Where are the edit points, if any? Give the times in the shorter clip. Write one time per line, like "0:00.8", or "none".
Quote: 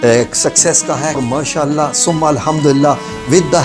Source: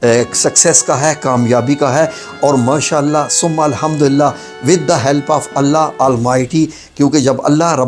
0:01.2